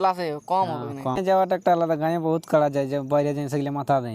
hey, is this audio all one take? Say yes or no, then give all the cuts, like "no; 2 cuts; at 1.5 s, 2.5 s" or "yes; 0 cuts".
no; 1 cut; at 1.2 s